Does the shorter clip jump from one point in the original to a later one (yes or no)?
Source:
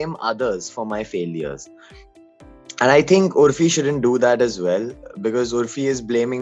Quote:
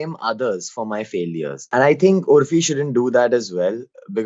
yes